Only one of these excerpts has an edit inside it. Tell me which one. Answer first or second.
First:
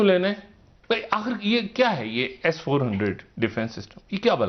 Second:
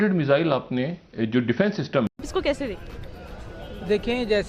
second